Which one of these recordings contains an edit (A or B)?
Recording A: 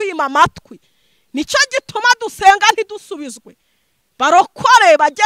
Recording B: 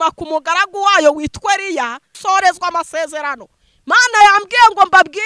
B